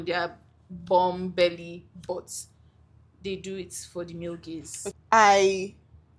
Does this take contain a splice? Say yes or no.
no